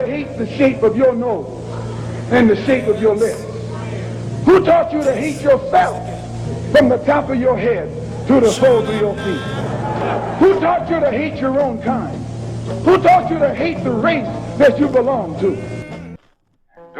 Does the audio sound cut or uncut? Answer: cut